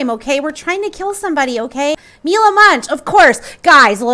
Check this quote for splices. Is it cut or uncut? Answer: cut